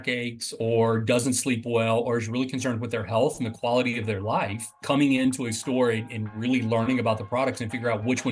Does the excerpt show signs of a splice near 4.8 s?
yes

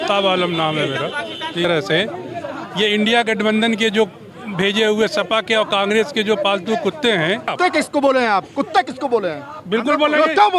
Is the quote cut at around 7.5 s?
yes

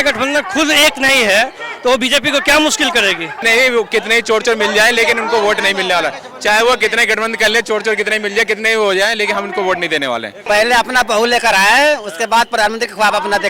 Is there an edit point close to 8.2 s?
no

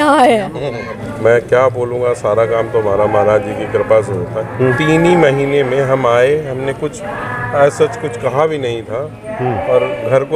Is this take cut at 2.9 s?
no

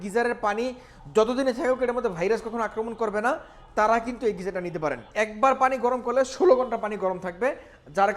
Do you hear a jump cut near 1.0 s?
no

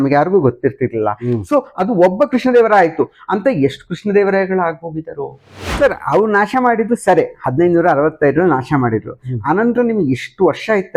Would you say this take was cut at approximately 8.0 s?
no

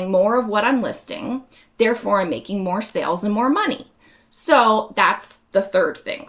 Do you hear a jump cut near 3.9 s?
no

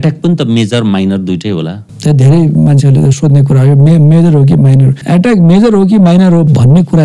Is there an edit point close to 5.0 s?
yes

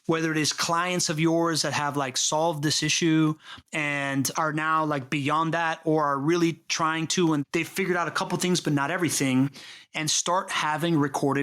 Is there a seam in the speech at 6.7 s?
no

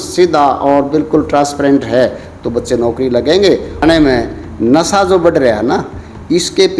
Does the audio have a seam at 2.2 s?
no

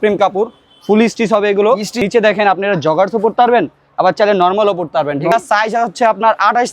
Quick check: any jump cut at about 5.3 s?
yes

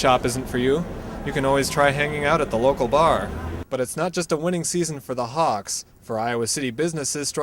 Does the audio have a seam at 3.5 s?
yes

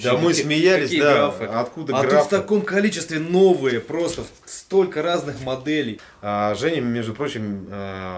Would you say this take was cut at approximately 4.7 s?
no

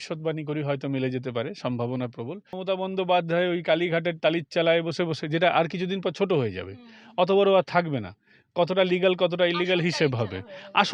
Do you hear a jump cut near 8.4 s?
no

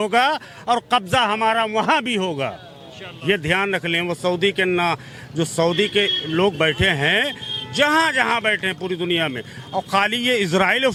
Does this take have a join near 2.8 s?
no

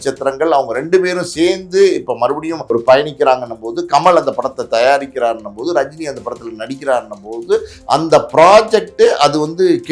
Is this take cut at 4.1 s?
no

